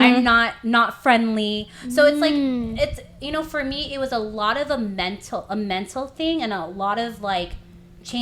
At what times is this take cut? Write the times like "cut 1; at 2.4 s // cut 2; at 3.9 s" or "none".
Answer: none